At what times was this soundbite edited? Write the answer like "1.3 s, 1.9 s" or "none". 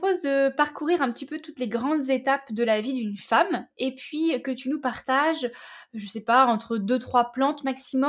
none